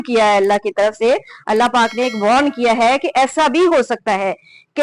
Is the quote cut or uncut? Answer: uncut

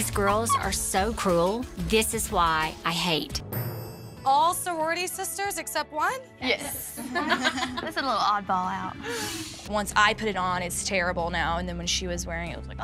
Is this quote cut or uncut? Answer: uncut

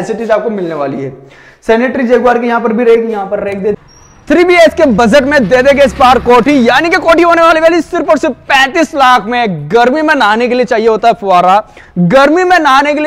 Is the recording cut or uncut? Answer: cut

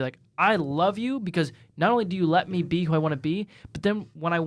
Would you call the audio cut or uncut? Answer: uncut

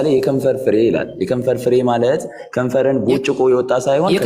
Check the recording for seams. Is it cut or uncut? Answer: uncut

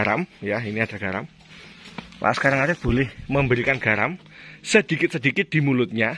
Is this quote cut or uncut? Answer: uncut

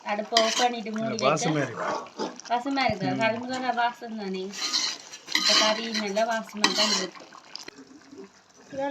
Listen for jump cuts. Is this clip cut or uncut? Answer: cut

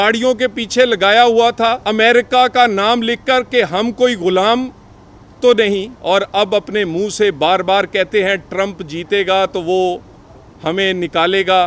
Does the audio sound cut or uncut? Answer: cut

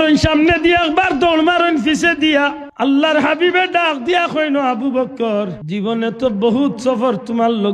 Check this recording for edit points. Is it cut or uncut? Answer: cut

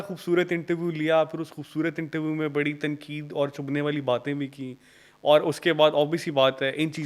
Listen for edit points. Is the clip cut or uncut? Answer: uncut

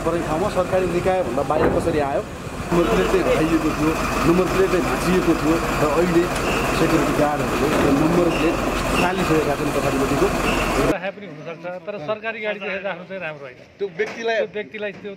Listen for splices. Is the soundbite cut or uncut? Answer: cut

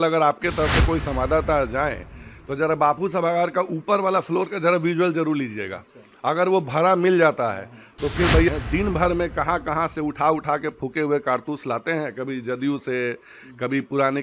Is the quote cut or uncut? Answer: cut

